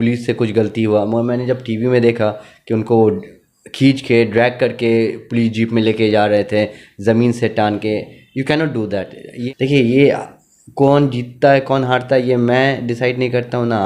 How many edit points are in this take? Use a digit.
1